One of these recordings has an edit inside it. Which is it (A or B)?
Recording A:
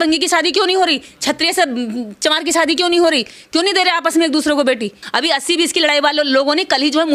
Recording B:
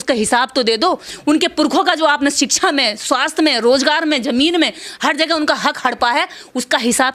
A